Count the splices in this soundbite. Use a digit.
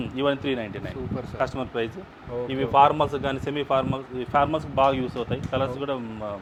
0